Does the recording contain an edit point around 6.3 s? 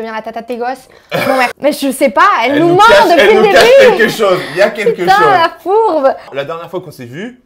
yes; 2 cuts; at 1.5 s, 6.3 s

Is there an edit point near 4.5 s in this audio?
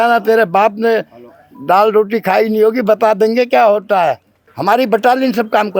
yes; 1 cut; at 4.5 s

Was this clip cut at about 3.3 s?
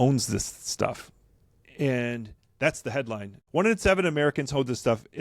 yes; 1 cut; at 3.3 s

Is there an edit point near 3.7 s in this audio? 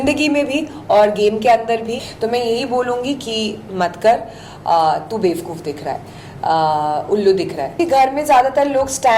no; 2 cuts; at 2.0 s, 7.8 s

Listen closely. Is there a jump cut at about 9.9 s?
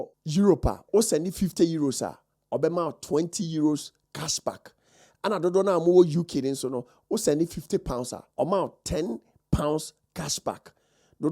no; 1 cut; at 8.2 s

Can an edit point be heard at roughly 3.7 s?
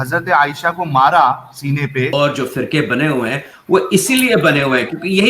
no; 1 cut; at 2.1 s

